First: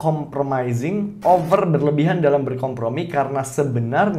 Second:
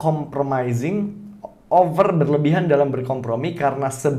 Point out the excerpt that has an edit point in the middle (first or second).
first